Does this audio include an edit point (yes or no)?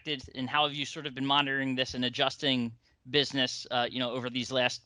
no